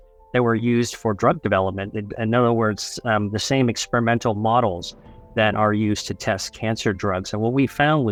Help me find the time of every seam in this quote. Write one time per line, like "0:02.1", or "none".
none